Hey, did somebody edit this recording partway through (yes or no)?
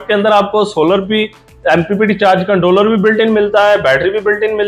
no